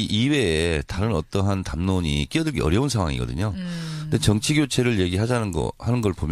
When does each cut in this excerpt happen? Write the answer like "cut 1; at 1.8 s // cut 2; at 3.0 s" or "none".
cut 1; at 3.2 s